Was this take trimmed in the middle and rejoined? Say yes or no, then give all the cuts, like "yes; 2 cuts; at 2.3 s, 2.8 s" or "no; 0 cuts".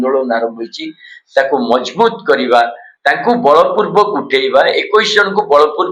yes; 1 cut; at 2.8 s